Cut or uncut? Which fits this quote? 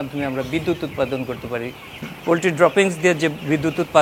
uncut